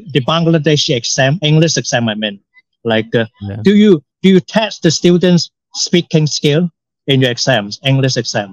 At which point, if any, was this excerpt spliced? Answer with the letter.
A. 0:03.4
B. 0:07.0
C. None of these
C